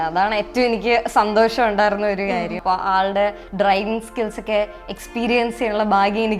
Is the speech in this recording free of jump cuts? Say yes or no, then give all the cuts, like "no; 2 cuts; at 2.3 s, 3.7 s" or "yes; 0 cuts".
no; 1 cut; at 2.6 s